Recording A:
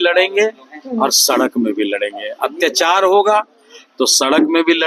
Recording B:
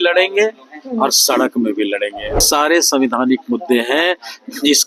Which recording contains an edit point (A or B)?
B